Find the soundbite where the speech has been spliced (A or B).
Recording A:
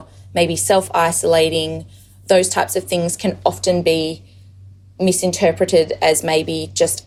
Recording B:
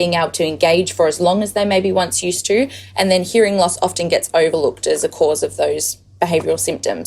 B